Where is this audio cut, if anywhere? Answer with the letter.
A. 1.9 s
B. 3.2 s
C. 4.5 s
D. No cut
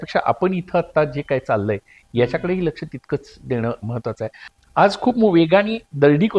C